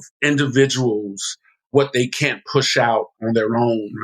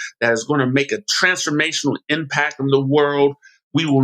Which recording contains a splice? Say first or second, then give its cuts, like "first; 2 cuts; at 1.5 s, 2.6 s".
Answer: first; 2 cuts; at 1.7 s, 3.1 s